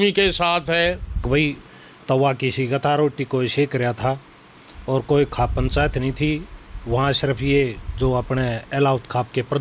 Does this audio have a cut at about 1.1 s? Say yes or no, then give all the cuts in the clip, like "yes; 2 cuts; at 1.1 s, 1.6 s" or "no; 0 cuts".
yes; 1 cut; at 1.1 s